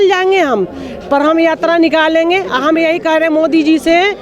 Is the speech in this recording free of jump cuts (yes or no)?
yes